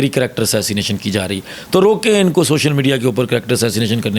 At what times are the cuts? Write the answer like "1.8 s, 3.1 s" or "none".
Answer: none